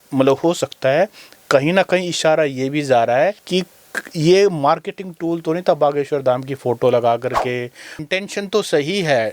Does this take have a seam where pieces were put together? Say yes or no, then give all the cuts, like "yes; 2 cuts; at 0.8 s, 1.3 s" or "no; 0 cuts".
yes; 1 cut; at 7.9 s